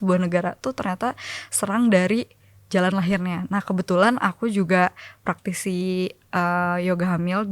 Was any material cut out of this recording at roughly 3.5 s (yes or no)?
no